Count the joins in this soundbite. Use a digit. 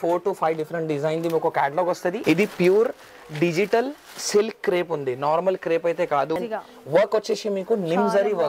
2